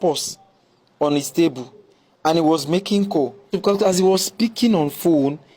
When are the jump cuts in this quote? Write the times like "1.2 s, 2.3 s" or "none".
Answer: 3.4 s